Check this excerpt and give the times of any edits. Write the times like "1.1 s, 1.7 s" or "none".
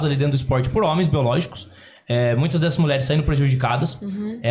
none